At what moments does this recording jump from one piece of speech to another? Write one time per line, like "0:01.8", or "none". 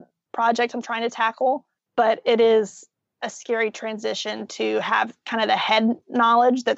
0:01.8